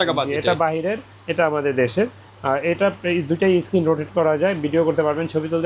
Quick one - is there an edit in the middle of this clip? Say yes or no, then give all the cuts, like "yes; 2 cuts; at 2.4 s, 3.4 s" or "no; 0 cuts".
no; 0 cuts